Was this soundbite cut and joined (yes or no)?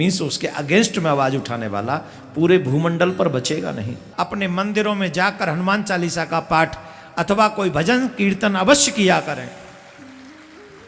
yes